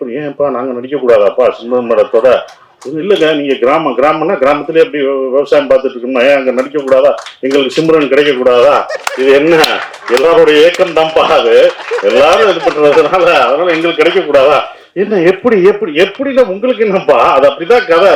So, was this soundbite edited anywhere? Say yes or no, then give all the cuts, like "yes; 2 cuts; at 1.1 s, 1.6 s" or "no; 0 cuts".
no; 0 cuts